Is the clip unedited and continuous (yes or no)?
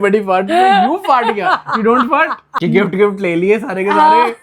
no